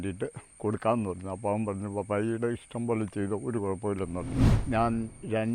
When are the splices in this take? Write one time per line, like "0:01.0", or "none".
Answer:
0:04.5